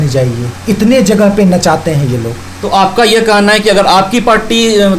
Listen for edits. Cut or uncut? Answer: uncut